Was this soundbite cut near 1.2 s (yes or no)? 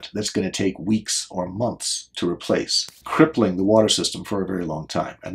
no